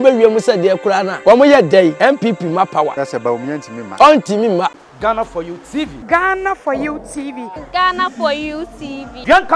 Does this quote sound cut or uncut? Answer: cut